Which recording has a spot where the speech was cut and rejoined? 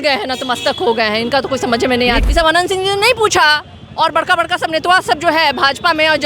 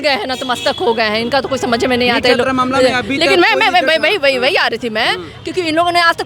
first; 1 cut; at 2.2 s

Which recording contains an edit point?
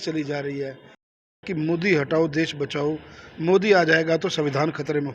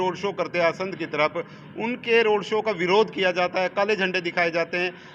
first; 1 cut; at 1.2 s

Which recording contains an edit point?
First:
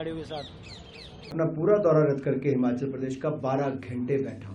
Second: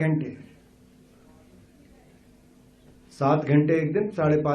first; 1 cut; at 1.3 s

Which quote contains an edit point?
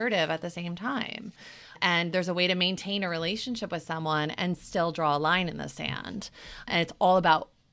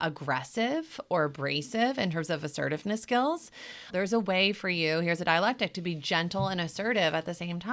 second; 1 cut; at 3.8 s

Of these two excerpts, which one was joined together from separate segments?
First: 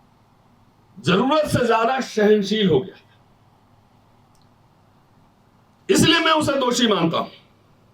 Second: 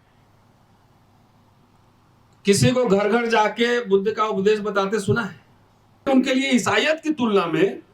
second; 1 cut; at 6.0 s

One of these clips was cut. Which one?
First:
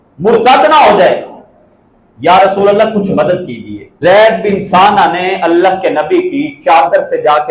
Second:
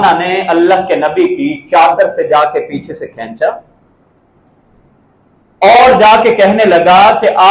first; 1 cut; at 4.0 s

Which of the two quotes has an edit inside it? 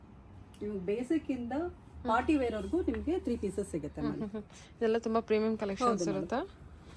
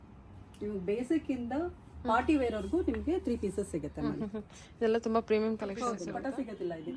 second; 1 cut; at 6.0 s

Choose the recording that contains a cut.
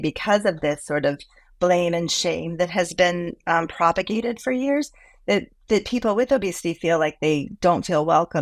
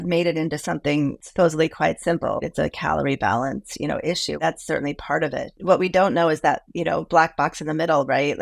second; 4 cuts; at 1.2 s, 2.4 s, 4.4 s, 5.5 s

